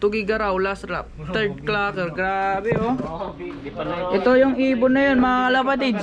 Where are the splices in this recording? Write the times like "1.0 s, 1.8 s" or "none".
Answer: none